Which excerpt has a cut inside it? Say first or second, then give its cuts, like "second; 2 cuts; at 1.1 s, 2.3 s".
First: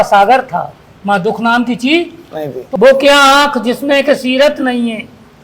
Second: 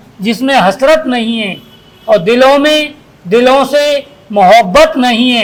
first; 1 cut; at 2.6 s